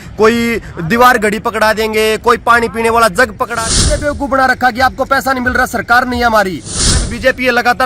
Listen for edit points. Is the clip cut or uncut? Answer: cut